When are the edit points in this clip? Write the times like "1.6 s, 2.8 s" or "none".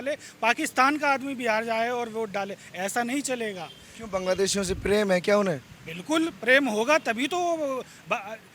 none